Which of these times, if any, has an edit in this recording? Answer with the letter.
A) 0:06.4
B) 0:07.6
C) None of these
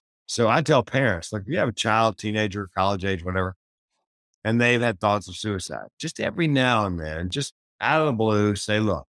B